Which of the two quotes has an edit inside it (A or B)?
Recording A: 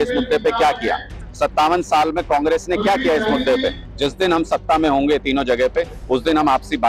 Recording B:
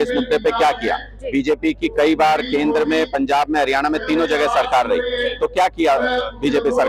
A